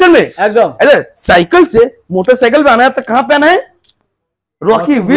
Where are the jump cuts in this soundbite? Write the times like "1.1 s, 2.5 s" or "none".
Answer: none